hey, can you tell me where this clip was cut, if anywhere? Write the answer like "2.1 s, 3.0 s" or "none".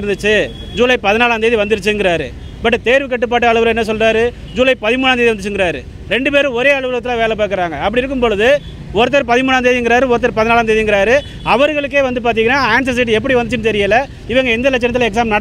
none